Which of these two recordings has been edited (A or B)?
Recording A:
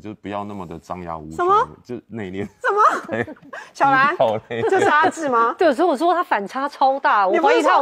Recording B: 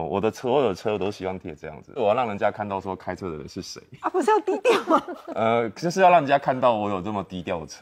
B